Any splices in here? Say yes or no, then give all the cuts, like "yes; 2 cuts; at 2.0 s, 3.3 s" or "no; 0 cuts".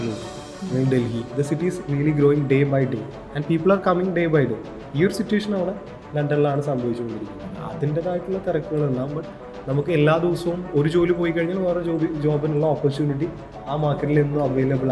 no; 0 cuts